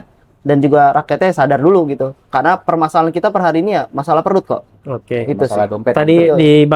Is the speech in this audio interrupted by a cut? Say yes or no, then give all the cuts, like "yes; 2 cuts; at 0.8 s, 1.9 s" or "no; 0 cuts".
no; 0 cuts